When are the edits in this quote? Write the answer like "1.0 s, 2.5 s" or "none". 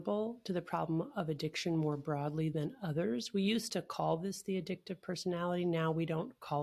none